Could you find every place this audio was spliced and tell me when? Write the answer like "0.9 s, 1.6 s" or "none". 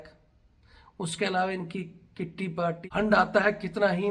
2.8 s